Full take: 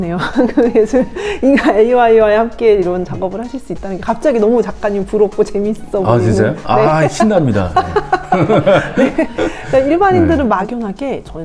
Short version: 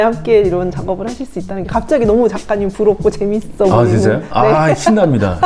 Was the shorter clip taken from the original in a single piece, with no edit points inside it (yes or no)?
yes